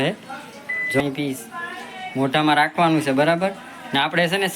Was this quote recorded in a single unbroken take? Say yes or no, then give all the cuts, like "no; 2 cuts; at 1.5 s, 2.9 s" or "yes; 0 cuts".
no; 1 cut; at 1.0 s